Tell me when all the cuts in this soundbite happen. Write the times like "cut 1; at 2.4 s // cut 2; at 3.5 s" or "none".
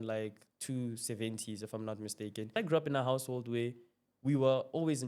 cut 1; at 2.5 s